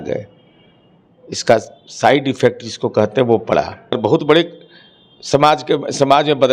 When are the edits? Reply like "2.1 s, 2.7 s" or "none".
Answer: 4.0 s